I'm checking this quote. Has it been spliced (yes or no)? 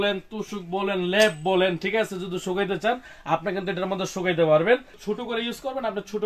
yes